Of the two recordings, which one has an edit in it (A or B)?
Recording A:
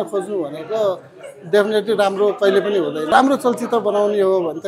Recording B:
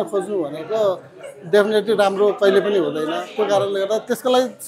A